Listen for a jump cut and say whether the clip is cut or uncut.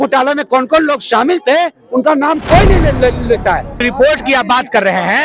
cut